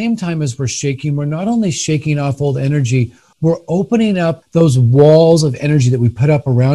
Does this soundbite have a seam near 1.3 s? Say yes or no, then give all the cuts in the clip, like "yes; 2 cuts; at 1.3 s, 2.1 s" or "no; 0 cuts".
no; 2 cuts; at 3.2 s, 4.4 s